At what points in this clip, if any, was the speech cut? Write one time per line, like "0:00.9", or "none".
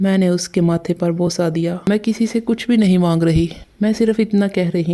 0:01.8